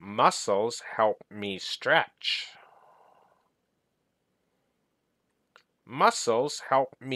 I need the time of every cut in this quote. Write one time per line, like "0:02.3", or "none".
0:04.0